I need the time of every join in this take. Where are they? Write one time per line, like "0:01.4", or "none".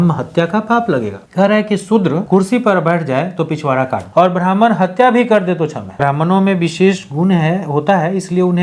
0:01.2
0:02.2
0:04.0
0:05.9